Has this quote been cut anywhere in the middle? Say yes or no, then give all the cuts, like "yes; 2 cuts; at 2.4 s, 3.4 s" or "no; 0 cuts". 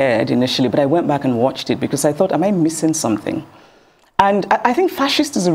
no; 0 cuts